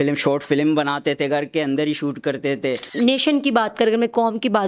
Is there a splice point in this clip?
yes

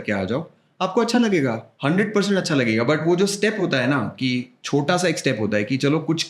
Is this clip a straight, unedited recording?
no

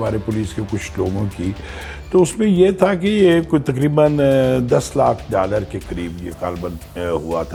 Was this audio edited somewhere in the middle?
no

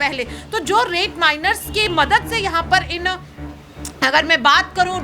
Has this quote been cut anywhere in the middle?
yes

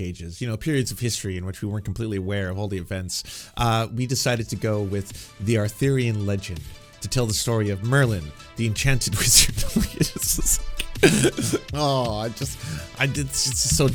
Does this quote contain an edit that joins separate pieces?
no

